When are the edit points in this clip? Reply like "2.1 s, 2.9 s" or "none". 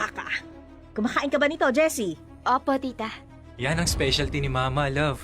2.3 s